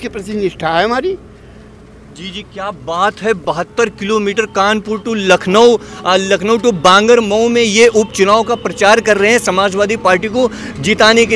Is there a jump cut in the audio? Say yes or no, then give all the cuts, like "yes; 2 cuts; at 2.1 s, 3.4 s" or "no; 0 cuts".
no; 0 cuts